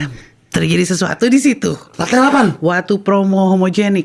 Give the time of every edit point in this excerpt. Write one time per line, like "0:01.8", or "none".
none